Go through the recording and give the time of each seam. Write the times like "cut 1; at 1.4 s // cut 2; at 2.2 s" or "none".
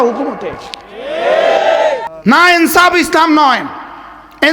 cut 1; at 2.1 s